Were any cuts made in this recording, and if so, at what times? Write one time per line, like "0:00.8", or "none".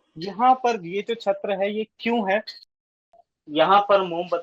0:03.0